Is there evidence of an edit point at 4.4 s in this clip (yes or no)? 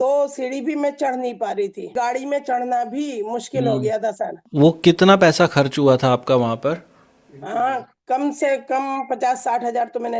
yes